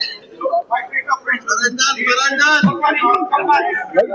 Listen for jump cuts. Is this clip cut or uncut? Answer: uncut